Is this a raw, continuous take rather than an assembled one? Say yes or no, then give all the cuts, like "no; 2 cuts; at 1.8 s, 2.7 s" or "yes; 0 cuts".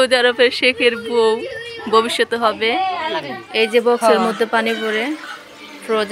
no; 1 cut; at 3.4 s